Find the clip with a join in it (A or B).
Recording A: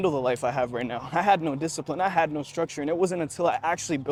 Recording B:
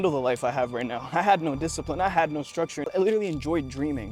B